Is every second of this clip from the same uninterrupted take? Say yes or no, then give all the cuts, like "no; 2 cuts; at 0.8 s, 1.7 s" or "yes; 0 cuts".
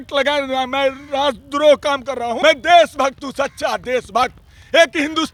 yes; 0 cuts